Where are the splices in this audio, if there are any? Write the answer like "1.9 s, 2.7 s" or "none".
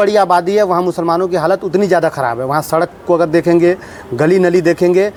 none